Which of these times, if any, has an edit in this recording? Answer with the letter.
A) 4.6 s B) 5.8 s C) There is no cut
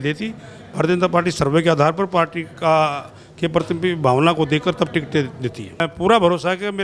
B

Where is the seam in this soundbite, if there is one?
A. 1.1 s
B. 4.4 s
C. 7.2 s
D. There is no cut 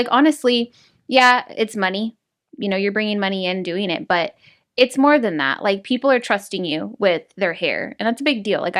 D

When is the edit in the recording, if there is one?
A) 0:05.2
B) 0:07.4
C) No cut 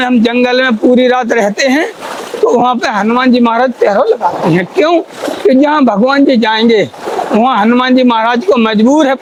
C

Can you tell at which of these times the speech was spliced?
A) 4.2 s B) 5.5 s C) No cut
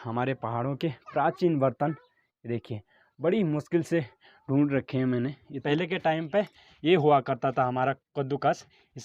B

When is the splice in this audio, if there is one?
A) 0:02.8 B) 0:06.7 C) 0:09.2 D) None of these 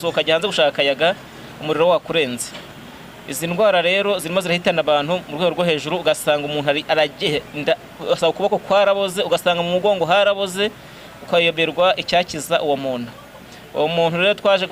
D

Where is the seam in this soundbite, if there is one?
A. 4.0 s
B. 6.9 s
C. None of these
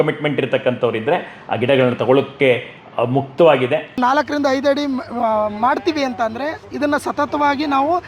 A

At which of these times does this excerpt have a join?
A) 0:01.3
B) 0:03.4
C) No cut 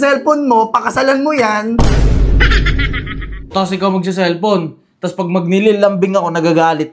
B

